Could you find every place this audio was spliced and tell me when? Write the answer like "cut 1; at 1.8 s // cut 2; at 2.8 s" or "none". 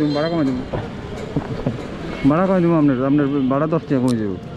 none